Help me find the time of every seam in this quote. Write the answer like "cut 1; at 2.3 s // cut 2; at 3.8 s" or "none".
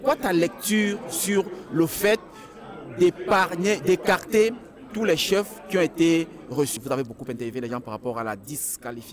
cut 1; at 6.8 s